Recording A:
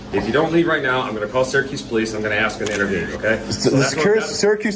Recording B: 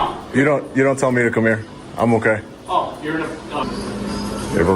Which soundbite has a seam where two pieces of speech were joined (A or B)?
B